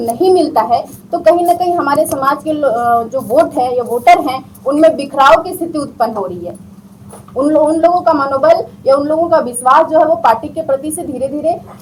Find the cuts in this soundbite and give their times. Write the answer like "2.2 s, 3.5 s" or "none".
none

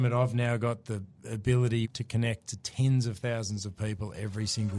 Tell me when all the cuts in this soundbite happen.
1.9 s

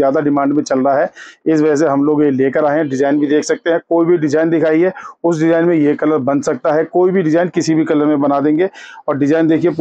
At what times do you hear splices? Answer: none

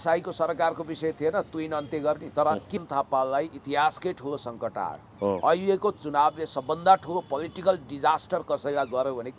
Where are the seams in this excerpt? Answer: 2.8 s

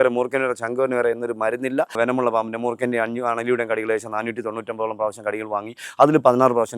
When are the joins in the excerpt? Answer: 1.9 s

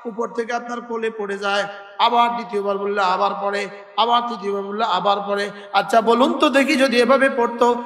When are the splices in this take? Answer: none

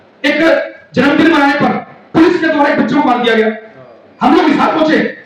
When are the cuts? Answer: none

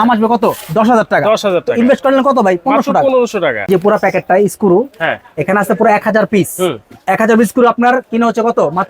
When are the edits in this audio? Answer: 3.6 s

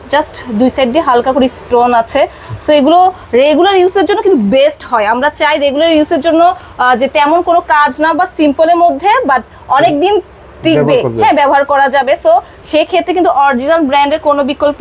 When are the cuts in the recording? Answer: none

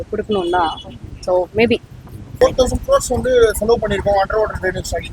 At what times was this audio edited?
2.4 s

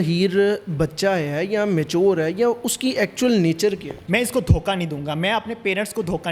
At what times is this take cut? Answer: 3.9 s

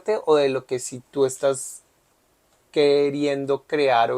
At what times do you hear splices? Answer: none

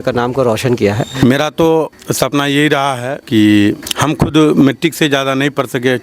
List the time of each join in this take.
1.1 s, 2.0 s, 3.2 s, 3.9 s

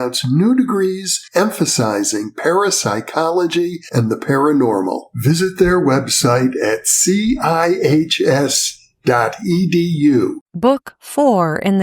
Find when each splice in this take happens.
10.5 s

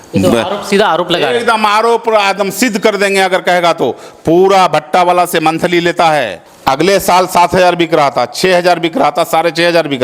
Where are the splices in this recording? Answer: 6.4 s

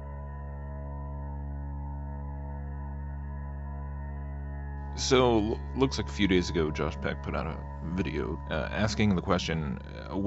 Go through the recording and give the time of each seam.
none

